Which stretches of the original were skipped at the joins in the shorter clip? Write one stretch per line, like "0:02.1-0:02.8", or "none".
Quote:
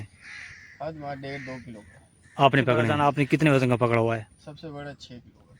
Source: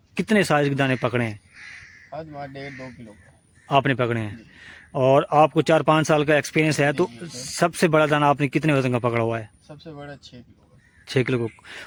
0:04.2-0:08.1